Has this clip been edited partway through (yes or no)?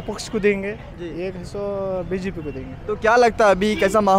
no